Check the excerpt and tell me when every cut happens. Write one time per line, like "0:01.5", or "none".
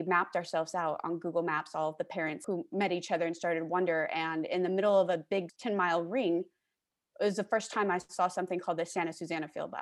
0:05.5